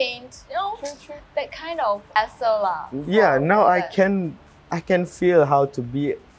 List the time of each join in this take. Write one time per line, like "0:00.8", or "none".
0:02.2

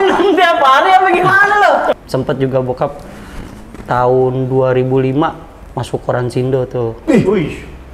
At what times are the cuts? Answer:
0:02.0

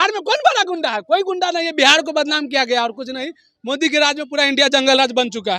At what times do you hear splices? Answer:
none

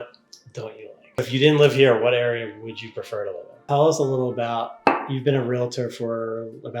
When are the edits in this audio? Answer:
0:01.2
0:03.6

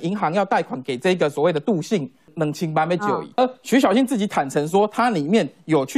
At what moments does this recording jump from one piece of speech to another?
0:02.2
0:03.4

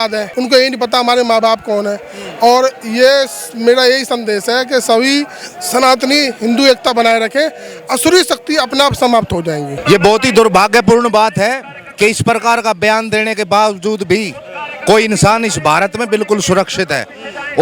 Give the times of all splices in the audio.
none

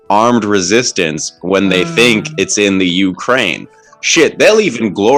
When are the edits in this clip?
none

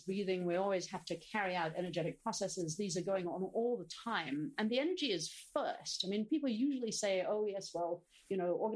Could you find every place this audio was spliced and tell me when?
none

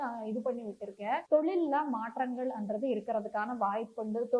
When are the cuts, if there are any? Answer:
0:01.2

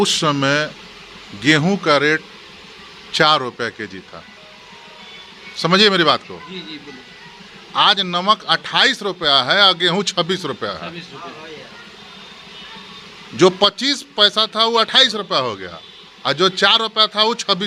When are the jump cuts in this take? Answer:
none

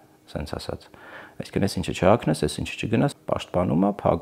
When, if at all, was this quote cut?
0:03.2

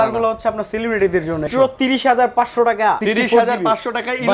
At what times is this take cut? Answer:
0:01.4
0:03.0

